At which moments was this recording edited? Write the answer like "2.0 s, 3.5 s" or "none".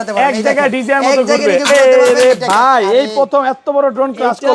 none